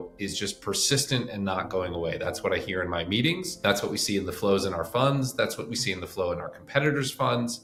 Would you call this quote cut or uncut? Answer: uncut